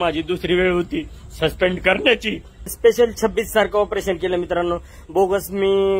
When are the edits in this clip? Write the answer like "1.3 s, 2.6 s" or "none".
2.7 s